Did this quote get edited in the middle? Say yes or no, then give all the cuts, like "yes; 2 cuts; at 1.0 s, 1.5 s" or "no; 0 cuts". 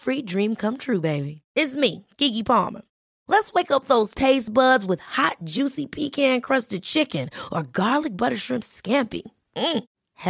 no; 0 cuts